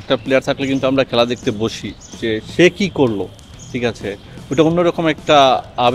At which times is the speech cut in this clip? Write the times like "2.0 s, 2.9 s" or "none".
none